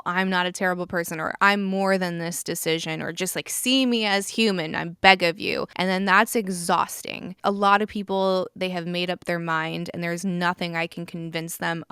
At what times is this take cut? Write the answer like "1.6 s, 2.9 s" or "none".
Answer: 5.7 s, 7.3 s